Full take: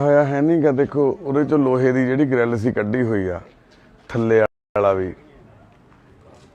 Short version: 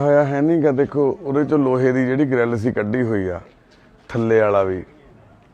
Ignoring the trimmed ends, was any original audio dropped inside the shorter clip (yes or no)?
yes